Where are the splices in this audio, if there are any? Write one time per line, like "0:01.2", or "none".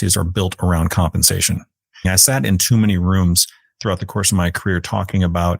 0:02.1